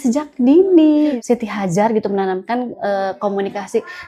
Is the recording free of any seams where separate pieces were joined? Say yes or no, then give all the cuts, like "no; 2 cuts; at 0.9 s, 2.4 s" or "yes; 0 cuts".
no; 1 cut; at 1.1 s